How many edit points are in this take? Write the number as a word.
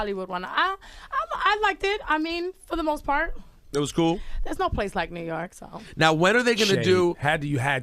one